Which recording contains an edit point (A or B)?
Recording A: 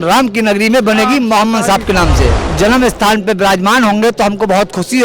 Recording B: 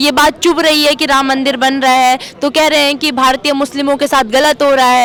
A